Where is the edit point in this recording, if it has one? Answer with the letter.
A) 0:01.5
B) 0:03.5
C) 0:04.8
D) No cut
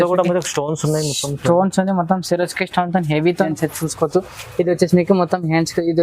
B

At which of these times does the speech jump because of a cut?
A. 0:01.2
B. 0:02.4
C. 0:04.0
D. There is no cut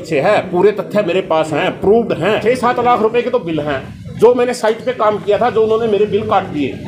B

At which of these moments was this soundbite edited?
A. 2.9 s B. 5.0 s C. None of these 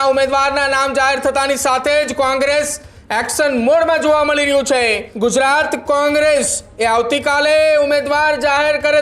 B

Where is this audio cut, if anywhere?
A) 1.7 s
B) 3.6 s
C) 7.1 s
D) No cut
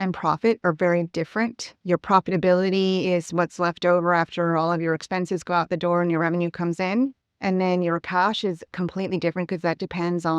D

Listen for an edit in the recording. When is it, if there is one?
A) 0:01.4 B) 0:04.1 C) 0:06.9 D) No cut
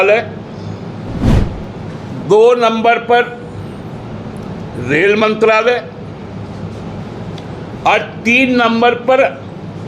A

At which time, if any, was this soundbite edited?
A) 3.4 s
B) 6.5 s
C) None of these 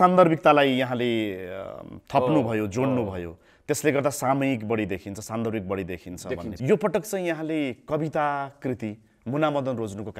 B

